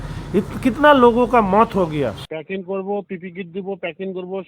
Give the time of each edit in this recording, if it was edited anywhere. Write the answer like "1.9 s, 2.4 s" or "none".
2.2 s